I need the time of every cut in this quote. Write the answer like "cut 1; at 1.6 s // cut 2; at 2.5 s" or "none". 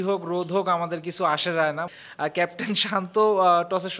cut 1; at 1.9 s